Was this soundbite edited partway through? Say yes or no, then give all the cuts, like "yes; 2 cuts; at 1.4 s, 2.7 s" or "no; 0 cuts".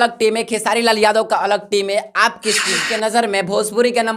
yes; 1 cut; at 2.8 s